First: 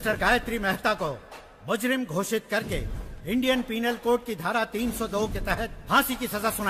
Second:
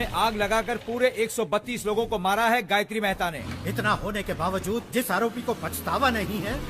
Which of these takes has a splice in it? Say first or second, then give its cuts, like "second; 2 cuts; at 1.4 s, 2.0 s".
second; 1 cut; at 3.4 s